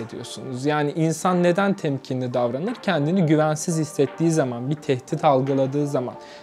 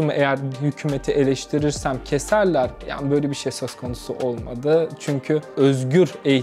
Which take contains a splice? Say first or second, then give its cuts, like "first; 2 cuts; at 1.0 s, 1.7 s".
second; 1 cut; at 5.5 s